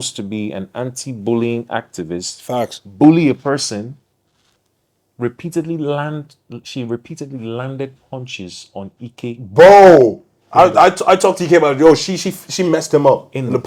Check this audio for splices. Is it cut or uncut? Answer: uncut